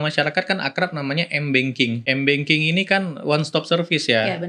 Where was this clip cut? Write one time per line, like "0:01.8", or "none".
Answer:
0:02.0